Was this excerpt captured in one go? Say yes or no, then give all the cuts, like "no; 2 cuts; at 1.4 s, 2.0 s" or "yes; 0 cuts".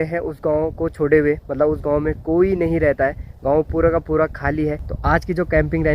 no; 1 cut; at 4.9 s